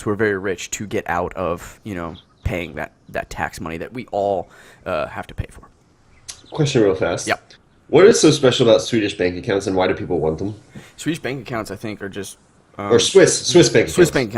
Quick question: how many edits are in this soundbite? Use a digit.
1